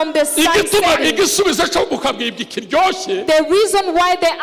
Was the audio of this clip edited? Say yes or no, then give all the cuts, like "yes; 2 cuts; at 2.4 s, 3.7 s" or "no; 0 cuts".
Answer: no; 0 cuts